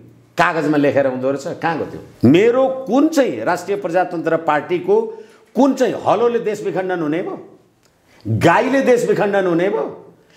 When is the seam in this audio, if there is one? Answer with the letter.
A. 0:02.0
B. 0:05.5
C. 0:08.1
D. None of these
A